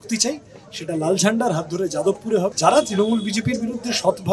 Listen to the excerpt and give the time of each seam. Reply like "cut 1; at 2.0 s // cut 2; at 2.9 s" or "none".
cut 1; at 2.5 s